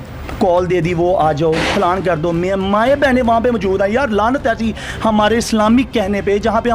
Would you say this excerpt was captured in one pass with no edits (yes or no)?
yes